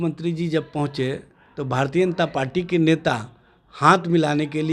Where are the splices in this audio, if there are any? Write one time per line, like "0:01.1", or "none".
none